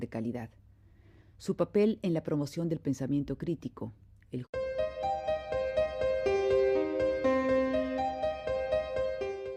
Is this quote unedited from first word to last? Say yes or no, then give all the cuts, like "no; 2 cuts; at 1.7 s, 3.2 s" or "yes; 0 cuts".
yes; 0 cuts